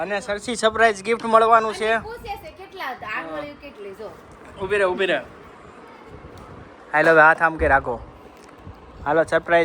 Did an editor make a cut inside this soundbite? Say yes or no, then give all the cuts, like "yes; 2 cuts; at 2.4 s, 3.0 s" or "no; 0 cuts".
no; 0 cuts